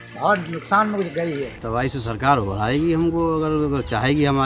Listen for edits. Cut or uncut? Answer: cut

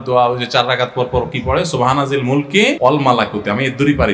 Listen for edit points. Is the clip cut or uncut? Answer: cut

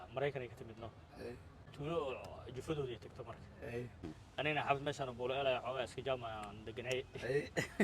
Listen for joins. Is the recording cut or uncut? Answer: cut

